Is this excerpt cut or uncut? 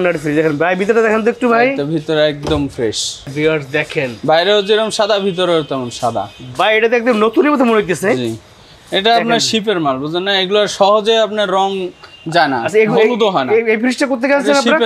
cut